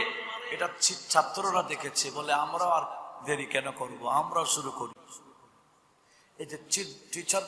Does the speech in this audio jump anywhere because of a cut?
no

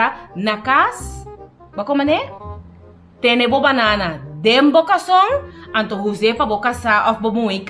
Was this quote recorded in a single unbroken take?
yes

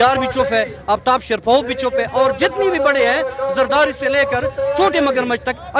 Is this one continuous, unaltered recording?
yes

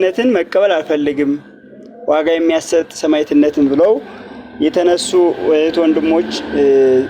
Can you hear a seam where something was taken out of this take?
no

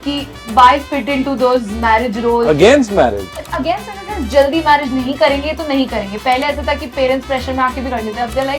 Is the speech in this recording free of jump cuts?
yes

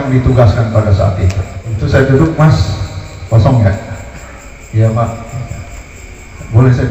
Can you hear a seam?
yes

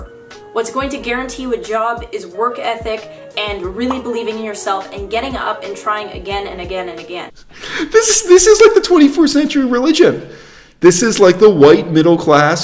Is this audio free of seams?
no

